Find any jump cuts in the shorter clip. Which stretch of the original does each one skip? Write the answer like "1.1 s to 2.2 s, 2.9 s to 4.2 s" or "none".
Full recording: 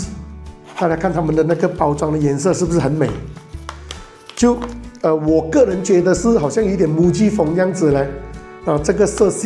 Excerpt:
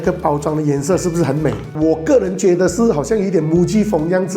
3.3 s to 5.2 s